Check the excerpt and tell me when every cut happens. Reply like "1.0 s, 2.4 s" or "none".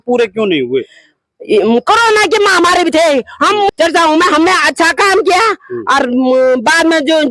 3.7 s